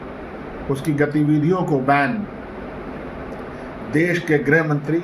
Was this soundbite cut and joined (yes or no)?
no